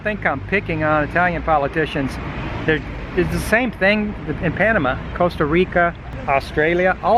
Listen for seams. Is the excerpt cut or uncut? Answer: cut